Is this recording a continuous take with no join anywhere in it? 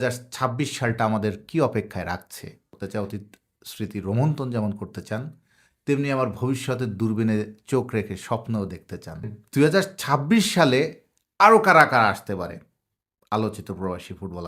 no; 2 cuts; at 2.7 s, 9.4 s

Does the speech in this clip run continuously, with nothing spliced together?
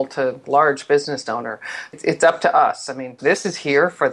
no; 2 cuts; at 1.9 s, 3.2 s

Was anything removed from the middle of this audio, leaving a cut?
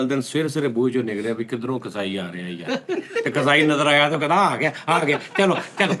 no; 0 cuts

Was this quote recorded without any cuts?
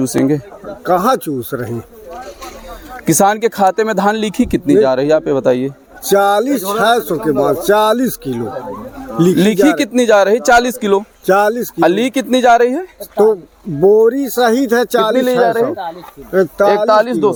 yes; 0 cuts

